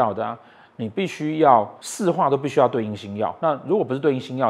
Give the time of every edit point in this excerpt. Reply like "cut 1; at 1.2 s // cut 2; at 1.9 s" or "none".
cut 1; at 1.8 s // cut 2; at 3.3 s